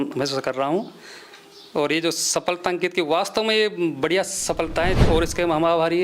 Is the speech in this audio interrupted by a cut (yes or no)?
yes